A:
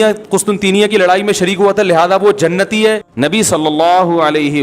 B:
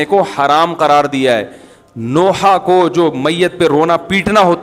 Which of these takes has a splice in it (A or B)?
A